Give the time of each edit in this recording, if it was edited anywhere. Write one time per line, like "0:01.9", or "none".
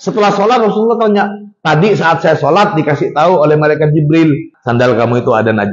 none